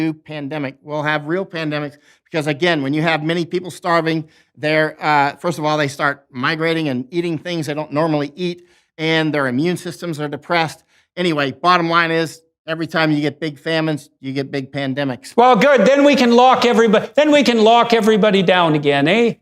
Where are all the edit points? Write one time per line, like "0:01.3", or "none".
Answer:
0:15.3